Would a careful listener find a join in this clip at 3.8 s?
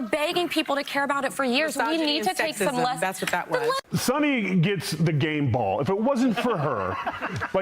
yes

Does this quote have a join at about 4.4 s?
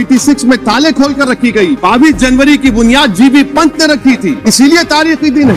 yes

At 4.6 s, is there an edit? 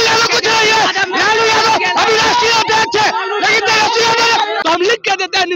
yes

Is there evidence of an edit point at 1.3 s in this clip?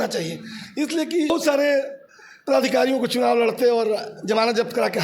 yes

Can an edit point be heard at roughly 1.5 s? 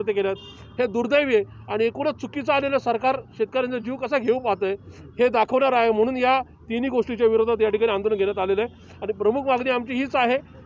no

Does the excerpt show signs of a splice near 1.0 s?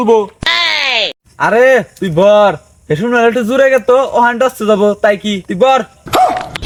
no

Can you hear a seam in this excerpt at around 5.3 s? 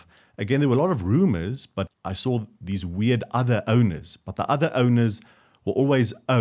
no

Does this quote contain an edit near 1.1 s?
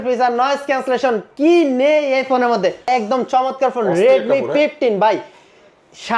no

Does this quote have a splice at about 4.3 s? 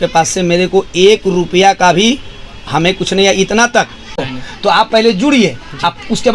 yes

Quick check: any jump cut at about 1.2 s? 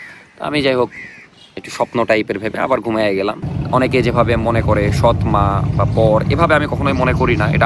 no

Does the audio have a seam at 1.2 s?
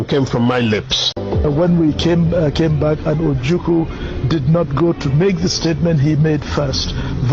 yes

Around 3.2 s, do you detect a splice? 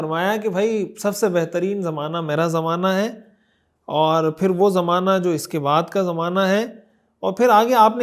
no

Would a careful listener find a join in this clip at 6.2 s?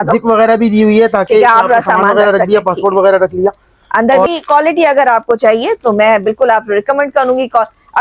no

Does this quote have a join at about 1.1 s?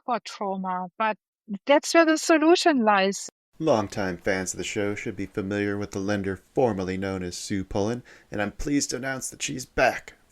no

